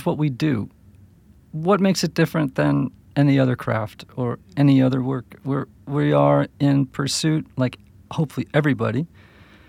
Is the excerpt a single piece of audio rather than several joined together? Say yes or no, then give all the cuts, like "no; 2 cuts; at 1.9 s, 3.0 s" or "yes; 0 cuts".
yes; 0 cuts